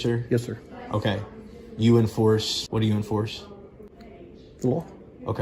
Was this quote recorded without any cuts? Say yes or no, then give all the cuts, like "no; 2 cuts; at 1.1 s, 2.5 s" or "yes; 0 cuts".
no; 1 cut; at 2.6 s